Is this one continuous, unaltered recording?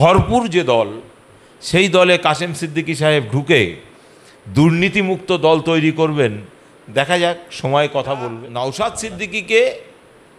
no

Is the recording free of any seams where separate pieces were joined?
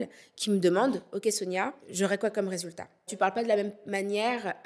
no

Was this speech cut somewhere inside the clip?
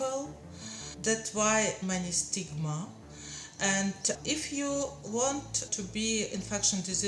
yes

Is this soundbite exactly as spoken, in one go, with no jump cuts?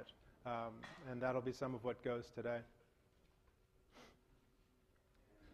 yes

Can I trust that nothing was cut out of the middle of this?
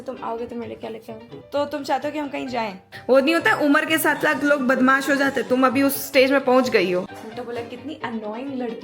no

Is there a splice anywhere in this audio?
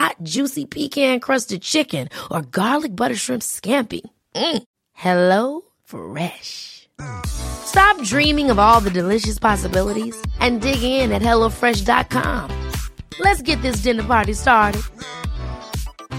no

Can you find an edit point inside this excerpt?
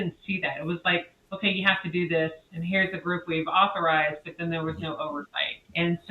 yes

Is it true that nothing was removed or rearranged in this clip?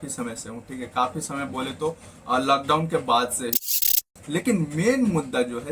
no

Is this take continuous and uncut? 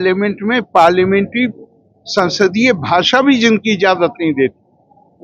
yes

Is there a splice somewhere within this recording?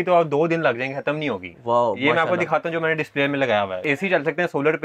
yes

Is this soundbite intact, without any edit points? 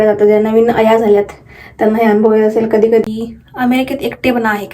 no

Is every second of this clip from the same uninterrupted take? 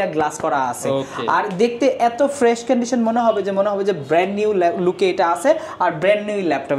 yes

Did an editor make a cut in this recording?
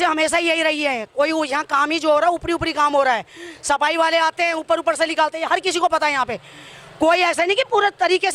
no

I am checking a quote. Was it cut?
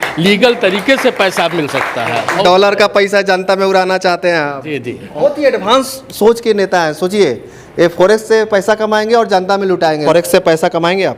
yes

